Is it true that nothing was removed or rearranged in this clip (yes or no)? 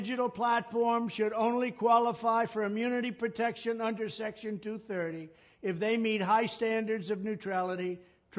yes